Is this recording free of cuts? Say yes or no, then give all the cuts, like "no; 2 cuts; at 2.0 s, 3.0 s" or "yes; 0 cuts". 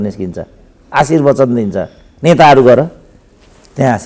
yes; 0 cuts